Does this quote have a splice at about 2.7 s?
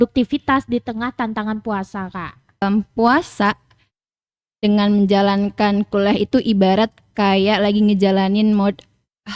yes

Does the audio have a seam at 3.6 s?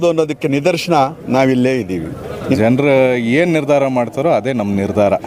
no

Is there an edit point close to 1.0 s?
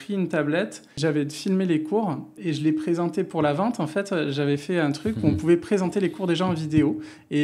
yes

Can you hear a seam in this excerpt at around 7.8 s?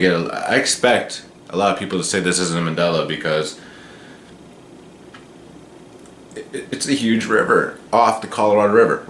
no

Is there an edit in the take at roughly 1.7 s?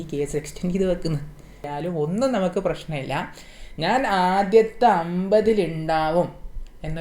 yes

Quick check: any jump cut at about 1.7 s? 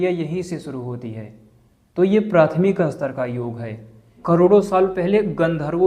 no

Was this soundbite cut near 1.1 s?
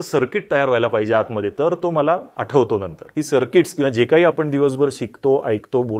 no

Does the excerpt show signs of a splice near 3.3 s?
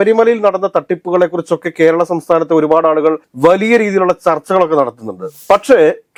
no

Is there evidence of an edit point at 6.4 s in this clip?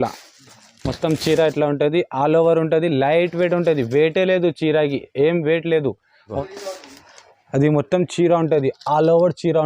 yes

